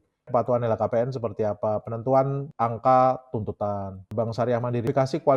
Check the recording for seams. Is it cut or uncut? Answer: cut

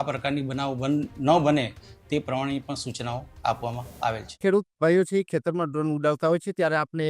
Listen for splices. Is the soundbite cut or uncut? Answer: uncut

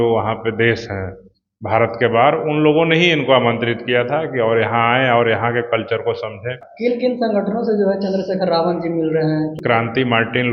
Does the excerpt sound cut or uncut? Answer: cut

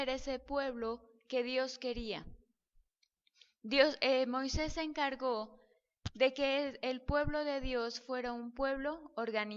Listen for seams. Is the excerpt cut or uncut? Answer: uncut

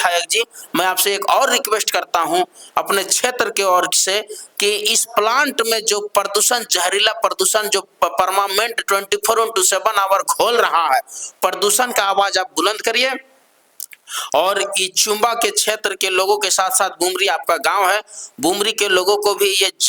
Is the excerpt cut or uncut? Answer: uncut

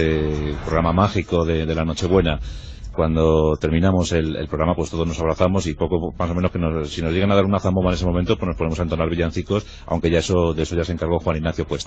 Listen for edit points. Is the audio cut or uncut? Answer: uncut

